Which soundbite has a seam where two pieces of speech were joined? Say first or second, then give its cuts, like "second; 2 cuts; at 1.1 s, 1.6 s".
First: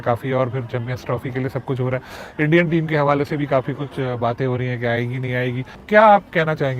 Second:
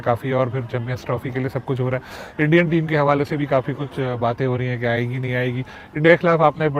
first; 1 cut; at 5.8 s